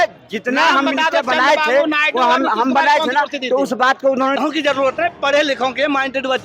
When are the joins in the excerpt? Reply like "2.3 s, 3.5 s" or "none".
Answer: 4.4 s